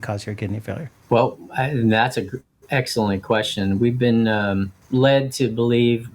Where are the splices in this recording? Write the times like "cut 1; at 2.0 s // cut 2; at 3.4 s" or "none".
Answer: cut 1; at 0.9 s // cut 2; at 4.8 s